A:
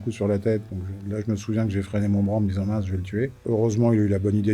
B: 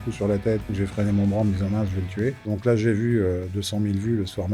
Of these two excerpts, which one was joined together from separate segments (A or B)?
B